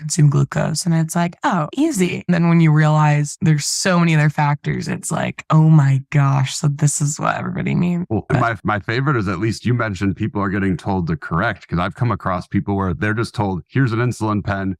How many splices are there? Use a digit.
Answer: 0